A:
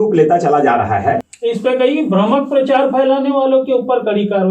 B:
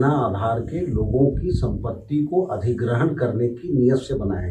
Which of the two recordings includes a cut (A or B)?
A